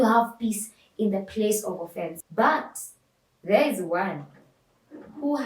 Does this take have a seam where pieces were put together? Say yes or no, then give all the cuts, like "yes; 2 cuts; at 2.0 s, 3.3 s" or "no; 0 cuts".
yes; 1 cut; at 2.2 s